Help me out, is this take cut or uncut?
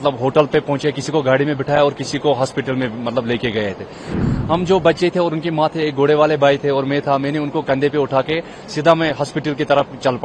cut